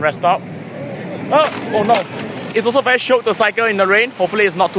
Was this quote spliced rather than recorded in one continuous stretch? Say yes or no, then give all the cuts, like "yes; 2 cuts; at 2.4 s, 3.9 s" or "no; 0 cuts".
yes; 1 cut; at 2.5 s